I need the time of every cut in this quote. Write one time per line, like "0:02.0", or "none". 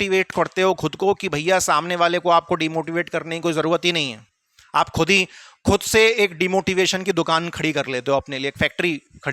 none